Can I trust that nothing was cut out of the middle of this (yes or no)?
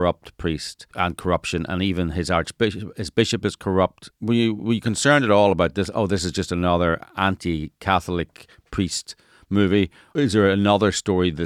no